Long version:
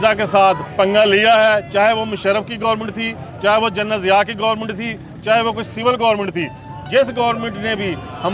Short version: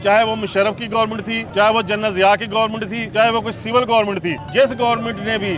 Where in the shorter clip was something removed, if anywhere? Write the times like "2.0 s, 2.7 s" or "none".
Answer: 1.4 s, 3.0 s, 4.4 s

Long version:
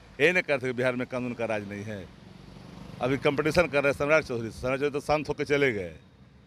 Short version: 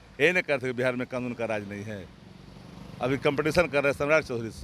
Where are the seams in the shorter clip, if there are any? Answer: none

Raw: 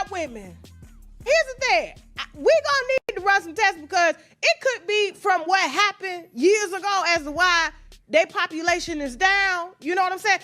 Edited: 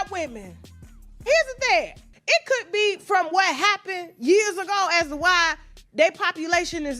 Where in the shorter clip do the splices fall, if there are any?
2.1 s

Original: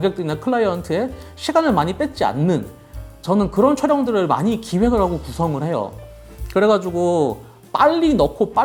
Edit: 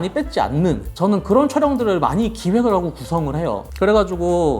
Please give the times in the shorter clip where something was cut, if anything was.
0.9 s, 3.7 s

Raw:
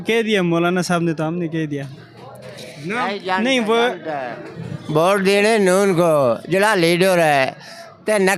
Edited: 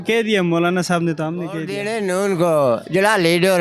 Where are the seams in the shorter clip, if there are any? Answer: 1.8 s

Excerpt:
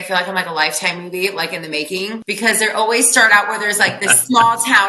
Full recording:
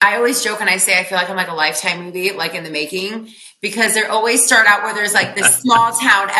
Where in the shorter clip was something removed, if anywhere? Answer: 2.2 s

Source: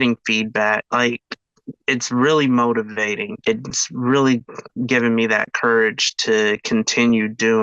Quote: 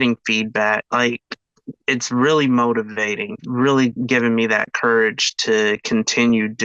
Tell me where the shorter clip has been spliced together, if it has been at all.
3.3 s, 4.0 s

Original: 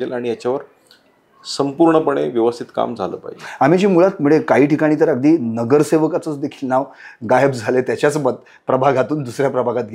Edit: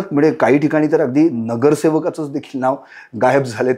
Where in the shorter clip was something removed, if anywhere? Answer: none

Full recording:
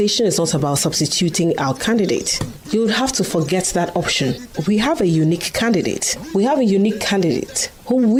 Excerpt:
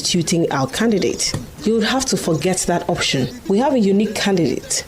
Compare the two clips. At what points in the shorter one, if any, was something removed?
3.3 s

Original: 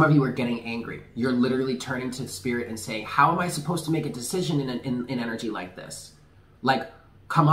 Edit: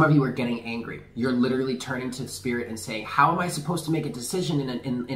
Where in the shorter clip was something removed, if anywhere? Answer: none

